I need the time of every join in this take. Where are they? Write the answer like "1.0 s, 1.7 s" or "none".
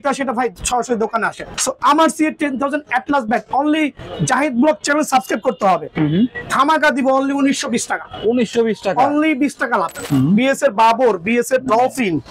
1.5 s, 10.0 s